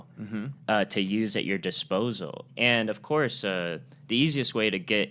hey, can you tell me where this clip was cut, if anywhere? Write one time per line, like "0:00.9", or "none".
0:02.4